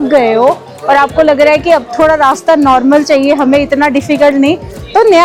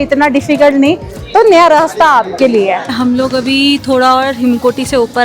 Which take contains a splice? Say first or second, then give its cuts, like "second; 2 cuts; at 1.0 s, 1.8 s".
second; 1 cut; at 2.9 s